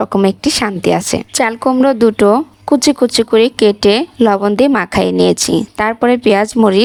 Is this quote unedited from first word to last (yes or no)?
yes